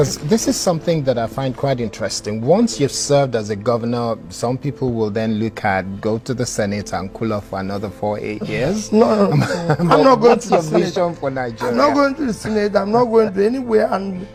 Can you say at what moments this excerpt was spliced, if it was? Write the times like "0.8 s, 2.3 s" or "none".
none